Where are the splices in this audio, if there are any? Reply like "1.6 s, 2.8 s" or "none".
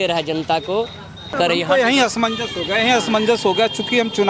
1.4 s